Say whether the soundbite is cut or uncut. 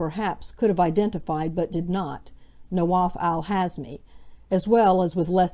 uncut